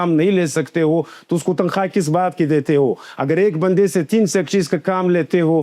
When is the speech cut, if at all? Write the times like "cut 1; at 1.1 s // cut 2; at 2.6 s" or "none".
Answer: none